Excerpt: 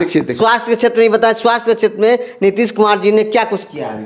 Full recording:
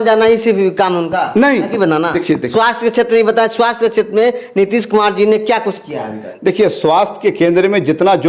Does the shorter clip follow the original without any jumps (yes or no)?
yes